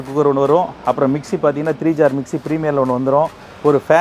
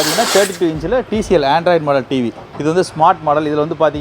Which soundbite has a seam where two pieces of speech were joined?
second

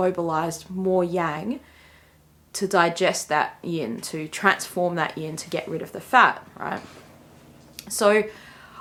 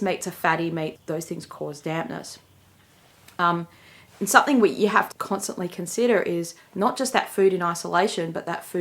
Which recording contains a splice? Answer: second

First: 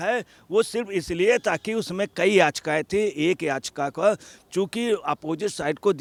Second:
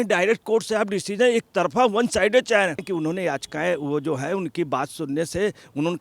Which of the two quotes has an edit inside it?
second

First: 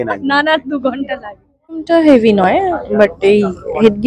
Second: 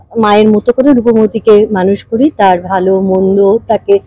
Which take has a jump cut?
first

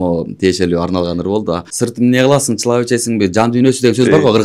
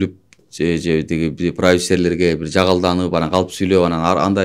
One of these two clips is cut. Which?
first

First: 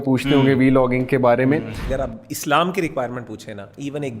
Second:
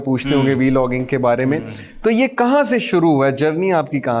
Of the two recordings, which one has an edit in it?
first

